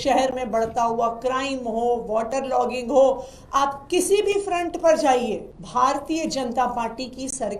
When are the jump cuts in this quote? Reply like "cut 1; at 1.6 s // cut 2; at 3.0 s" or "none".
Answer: cut 1; at 5.5 s